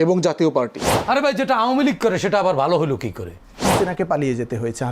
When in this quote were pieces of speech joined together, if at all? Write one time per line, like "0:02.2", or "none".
0:00.9
0:03.7